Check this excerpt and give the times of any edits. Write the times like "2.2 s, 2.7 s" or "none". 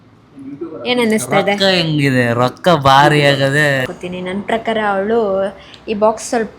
3.8 s